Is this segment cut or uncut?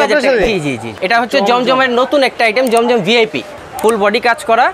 cut